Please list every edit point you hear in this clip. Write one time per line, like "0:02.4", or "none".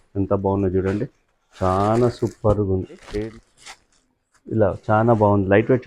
0:03.2